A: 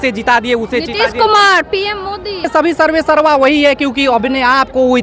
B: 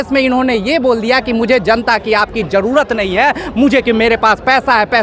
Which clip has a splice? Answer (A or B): A